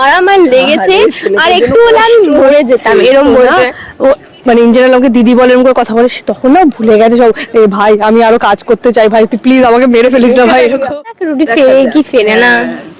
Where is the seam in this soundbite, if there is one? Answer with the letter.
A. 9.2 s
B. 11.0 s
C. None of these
B